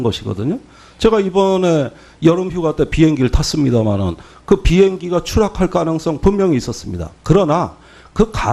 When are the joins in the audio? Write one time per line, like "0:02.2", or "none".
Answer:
0:02.4